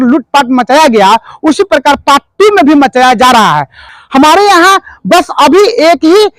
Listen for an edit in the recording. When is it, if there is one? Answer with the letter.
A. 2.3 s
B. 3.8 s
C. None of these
B